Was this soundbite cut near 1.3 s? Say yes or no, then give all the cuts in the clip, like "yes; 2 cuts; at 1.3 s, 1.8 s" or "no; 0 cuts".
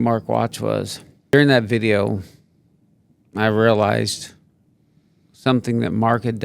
yes; 1 cut; at 1.3 s